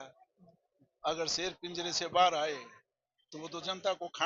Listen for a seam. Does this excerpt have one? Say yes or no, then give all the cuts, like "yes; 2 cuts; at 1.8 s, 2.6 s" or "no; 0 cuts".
no; 0 cuts